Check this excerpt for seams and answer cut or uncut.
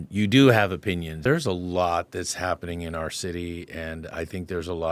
cut